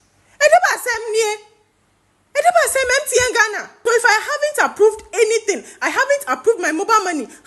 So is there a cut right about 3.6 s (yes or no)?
yes